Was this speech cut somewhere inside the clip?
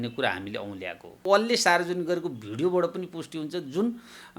yes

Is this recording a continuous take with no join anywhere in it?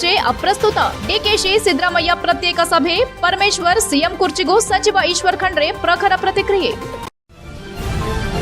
no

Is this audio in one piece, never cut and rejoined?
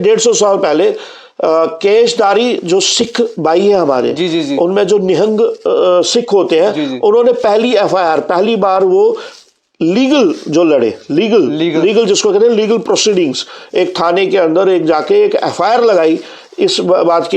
yes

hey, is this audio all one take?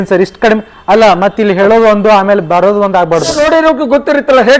no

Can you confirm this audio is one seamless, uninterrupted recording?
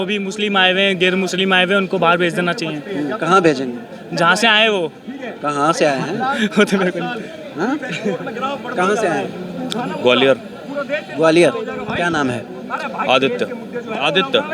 yes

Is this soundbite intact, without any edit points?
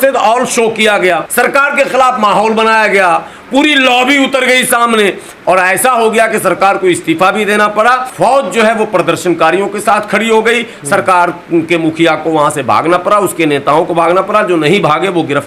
yes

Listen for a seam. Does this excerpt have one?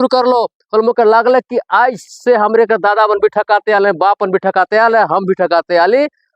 no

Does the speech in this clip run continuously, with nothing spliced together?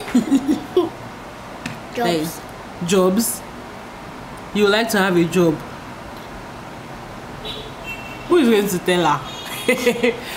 no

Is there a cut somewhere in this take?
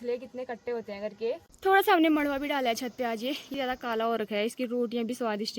yes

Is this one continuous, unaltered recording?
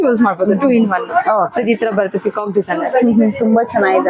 yes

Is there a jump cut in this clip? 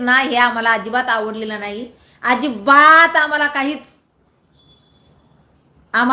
no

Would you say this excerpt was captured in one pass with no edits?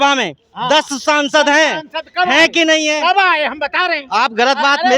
yes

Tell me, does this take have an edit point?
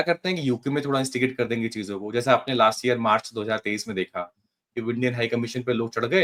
no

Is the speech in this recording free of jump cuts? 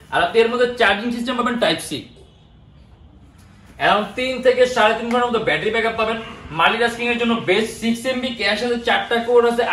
yes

